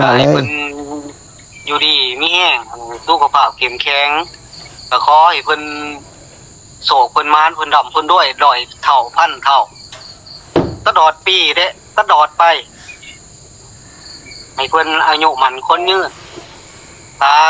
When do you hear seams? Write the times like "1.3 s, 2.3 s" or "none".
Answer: none